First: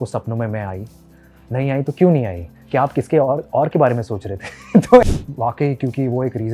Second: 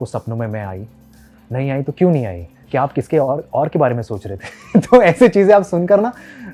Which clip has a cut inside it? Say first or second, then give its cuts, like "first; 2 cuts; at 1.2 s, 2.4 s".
first; 1 cut; at 5.0 s